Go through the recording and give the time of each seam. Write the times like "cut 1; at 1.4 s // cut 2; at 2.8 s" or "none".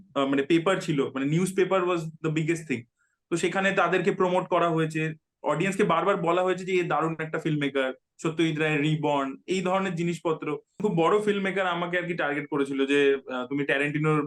cut 1; at 10.8 s